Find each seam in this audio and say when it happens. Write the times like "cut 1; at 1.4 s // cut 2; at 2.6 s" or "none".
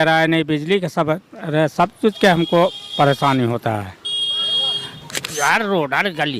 cut 1; at 5.3 s